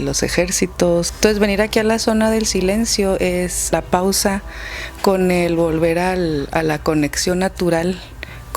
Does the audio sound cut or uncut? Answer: cut